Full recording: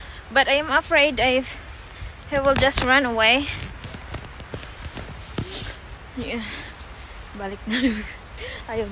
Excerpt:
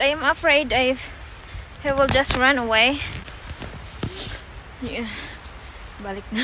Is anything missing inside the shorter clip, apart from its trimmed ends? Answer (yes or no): yes